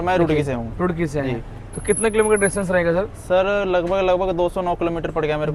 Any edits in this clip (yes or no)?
no